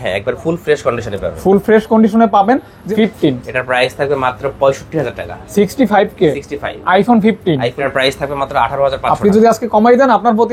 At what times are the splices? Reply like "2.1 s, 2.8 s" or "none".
2.7 s, 7.8 s